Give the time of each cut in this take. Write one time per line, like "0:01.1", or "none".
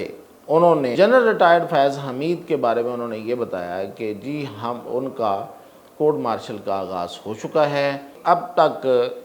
0:00.9
0:08.1

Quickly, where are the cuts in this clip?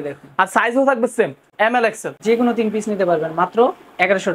0:01.7

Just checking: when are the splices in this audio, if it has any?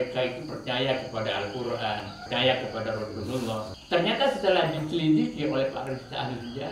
0:02.1
0:03.7

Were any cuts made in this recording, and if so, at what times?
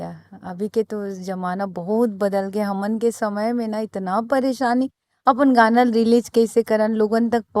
none

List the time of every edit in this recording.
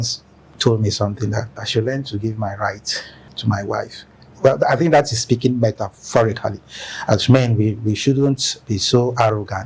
0:01.6
0:03.2

